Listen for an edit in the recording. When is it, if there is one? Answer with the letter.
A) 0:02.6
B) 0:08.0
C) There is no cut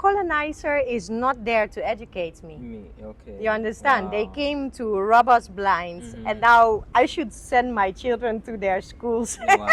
C